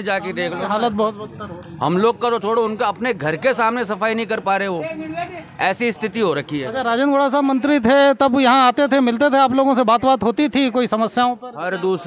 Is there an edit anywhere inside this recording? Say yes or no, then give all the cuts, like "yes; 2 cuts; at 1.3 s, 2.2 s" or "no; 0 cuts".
no; 0 cuts